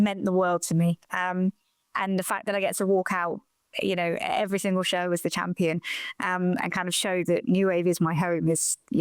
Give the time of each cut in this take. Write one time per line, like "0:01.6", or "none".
none